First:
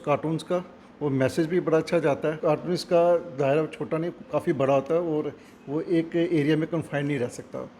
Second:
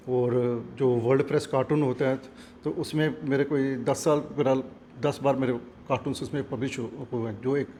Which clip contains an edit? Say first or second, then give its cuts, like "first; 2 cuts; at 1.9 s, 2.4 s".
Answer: first; 1 cut; at 2.4 s